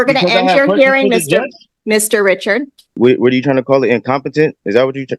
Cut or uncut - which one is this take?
cut